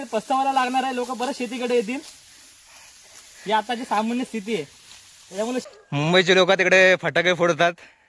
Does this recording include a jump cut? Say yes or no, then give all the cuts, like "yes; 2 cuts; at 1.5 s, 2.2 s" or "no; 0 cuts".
yes; 1 cut; at 5.6 s